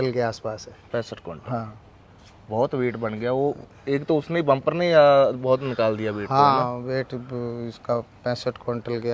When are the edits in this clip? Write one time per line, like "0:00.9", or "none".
none

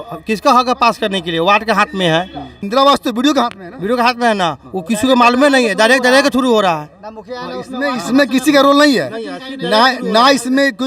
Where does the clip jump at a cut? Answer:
0:02.6

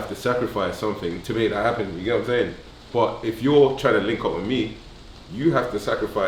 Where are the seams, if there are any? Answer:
0:01.2

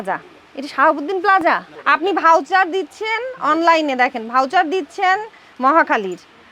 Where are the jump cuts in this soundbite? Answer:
0:01.7

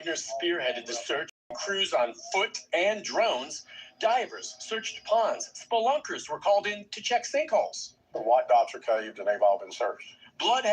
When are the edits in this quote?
0:01.4

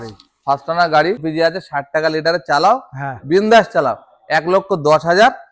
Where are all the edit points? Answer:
0:01.2

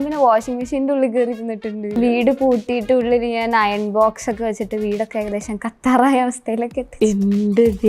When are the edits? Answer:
0:02.0

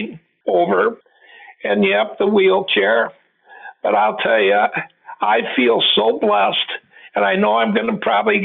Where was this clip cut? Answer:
0:01.0

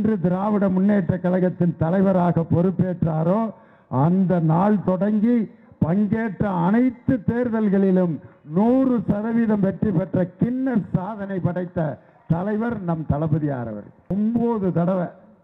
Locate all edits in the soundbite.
0:14.1

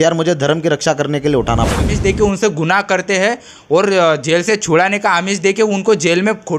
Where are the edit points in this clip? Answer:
0:01.9

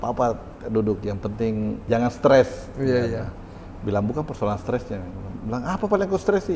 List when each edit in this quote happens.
0:01.8

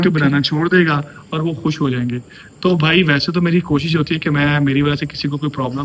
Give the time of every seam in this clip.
none

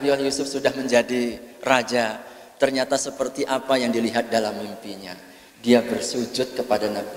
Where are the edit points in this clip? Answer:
none

